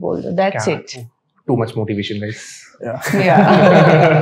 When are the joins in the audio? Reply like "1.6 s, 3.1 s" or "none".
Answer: none